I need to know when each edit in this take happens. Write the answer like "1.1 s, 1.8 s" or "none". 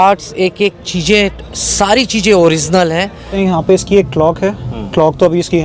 3.3 s